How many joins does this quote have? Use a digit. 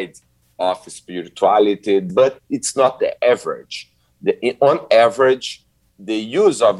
1